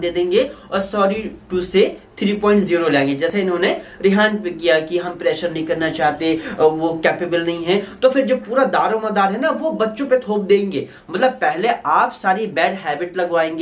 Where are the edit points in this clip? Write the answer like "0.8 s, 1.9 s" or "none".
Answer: none